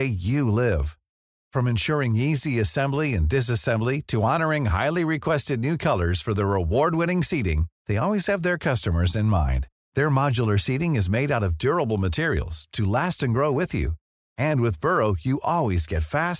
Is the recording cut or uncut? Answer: uncut